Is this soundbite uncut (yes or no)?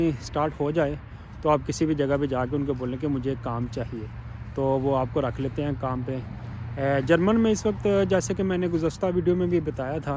yes